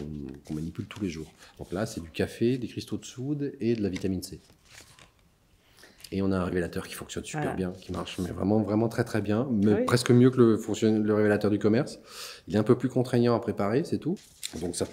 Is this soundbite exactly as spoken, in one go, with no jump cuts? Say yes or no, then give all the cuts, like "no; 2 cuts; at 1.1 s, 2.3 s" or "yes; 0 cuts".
yes; 0 cuts